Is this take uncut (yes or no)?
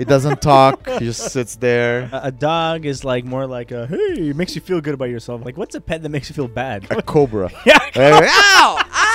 no